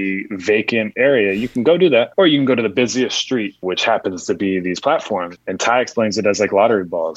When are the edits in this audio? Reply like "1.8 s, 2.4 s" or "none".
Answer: 0.9 s, 2.1 s, 3.6 s, 5.3 s

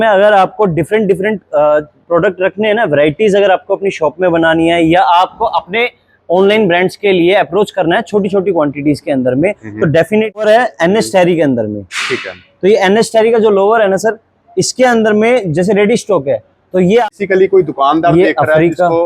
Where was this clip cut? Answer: 10.4 s, 17.1 s

